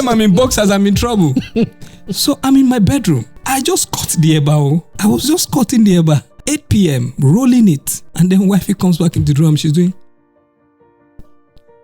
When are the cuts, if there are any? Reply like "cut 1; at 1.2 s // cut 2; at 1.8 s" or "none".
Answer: cut 1; at 3.3 s // cut 2; at 4.9 s // cut 3; at 6.3 s // cut 4; at 8.0 s